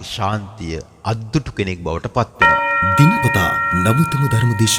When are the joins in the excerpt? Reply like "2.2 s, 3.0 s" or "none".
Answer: 2.4 s